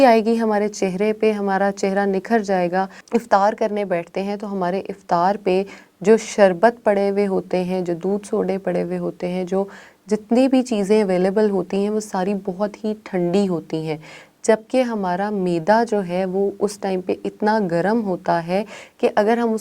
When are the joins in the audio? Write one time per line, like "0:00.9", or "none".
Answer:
0:03.0